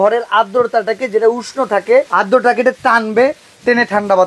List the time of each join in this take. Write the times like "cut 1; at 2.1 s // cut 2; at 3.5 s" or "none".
cut 1; at 2.1 s